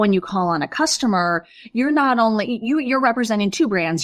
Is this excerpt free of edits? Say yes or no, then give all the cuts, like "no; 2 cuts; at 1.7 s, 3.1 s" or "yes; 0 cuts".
yes; 0 cuts